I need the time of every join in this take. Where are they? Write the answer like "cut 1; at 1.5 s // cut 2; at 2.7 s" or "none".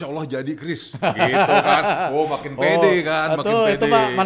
none